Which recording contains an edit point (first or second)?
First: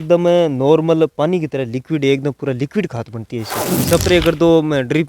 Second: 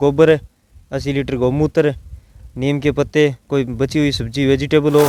first